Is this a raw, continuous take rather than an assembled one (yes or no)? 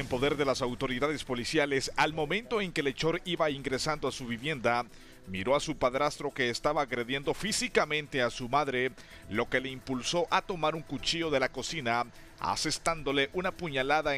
no